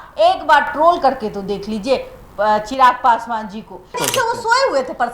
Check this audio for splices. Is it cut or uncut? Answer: cut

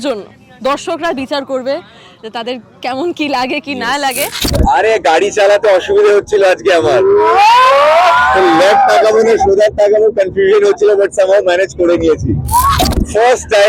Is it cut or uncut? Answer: cut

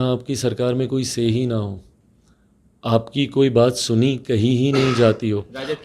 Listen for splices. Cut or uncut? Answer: uncut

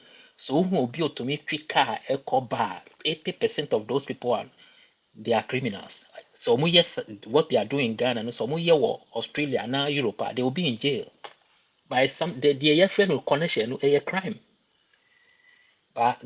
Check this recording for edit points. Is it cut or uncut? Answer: uncut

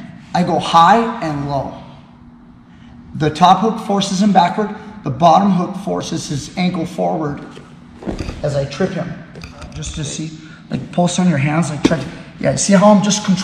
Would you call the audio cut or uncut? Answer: cut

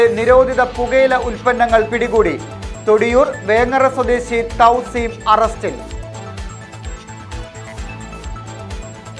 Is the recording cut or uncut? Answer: uncut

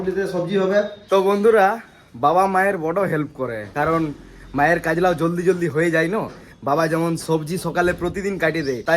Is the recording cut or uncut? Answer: cut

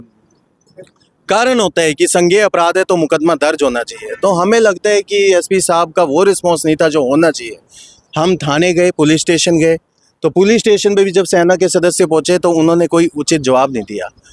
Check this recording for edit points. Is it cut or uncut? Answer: uncut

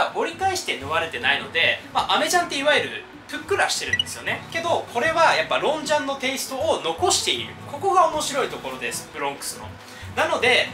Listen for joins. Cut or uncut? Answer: uncut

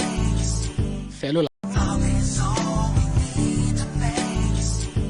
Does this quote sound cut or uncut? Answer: cut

